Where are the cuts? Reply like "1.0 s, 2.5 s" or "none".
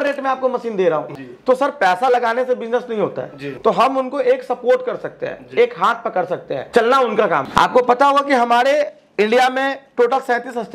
1.2 s, 3.5 s, 6.6 s, 7.5 s